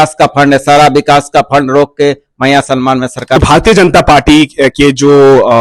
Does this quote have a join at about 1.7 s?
no; 1 cut; at 3.4 s

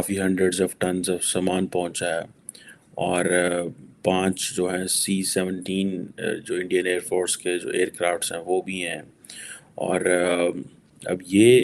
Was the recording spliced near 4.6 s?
no; 0 cuts

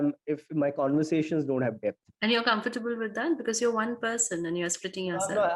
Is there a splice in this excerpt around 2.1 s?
yes; 1 cut; at 2.1 s

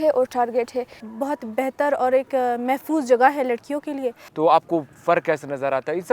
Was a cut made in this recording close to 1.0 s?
yes; 2 cuts; at 1.0 s, 4.2 s

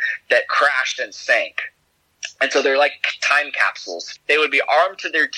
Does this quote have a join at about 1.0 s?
no; 1 cut; at 4.0 s

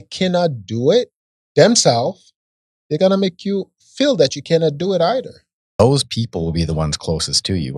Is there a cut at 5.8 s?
yes; 1 cut; at 5.8 s

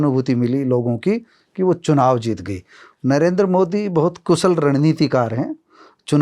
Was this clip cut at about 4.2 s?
no; 1 cut; at 2.8 s

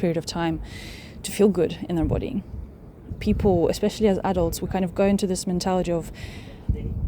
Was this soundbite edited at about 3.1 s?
yes; 1 cut; at 3.1 s

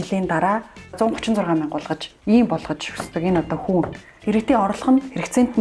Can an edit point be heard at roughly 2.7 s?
no; 2 cuts; at 1.0 s, 4.1 s

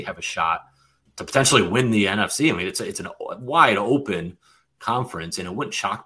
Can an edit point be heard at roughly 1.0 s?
yes; 1 cut; at 1.0 s

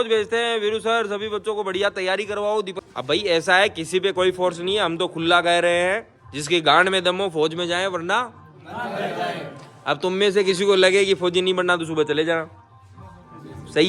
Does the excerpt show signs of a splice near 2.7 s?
yes; 1 cut; at 2.7 s

